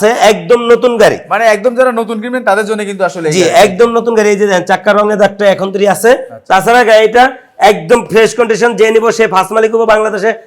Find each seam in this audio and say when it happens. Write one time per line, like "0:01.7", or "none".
none

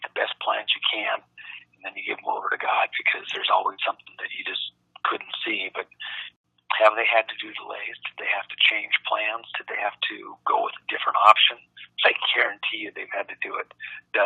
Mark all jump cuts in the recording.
0:06.2

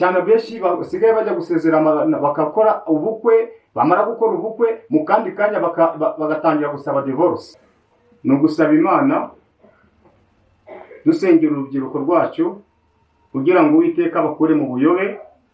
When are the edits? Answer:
0:07.5

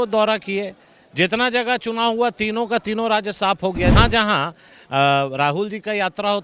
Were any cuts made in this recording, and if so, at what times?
0:03.9

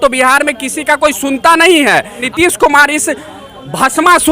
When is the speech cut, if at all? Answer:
0:02.2

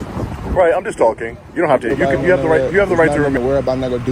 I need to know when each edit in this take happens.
0:03.2

